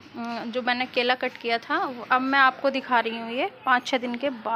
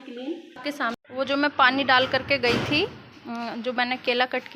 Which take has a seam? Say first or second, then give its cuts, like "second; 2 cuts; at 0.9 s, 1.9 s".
second; 1 cut; at 0.9 s